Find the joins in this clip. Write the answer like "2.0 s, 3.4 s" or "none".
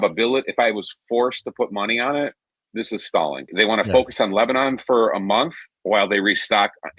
3.5 s